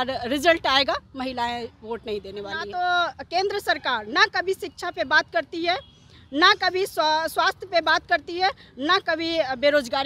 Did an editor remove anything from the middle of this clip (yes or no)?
yes